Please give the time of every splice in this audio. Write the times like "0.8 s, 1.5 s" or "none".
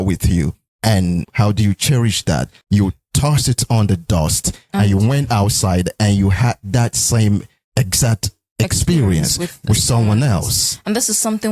1.3 s, 2.5 s